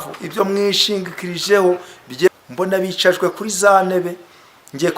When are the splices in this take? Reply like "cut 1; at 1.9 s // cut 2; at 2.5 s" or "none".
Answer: cut 1; at 2.3 s

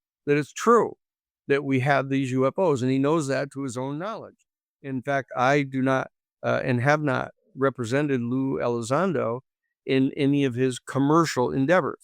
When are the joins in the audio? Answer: cut 1; at 4.9 s

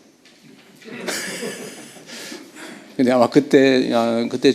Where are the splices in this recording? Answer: none

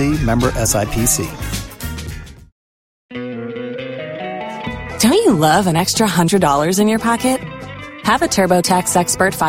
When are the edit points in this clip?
cut 1; at 3.1 s

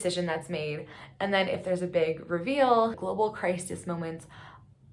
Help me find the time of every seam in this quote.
cut 1; at 3.0 s

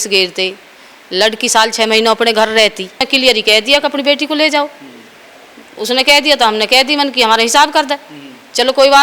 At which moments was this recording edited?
cut 1; at 3.0 s

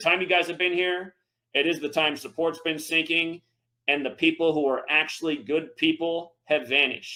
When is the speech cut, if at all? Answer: none

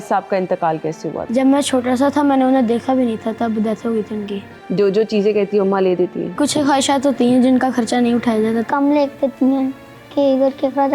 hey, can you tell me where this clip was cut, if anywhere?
cut 1; at 1.2 s // cut 2; at 4.5 s // cut 3; at 6.4 s // cut 4; at 8.7 s

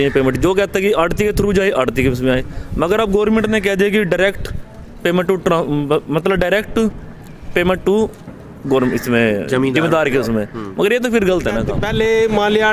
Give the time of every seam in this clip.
cut 1; at 11.7 s

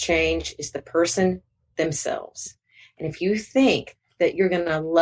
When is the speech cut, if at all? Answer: cut 1; at 3.9 s

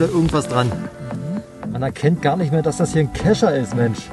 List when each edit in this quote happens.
cut 1; at 1.7 s

